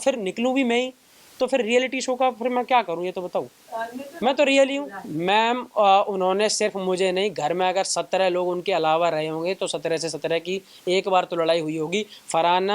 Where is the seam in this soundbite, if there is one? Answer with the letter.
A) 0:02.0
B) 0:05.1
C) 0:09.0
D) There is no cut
B